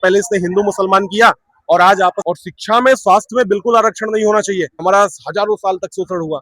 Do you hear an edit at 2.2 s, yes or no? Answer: yes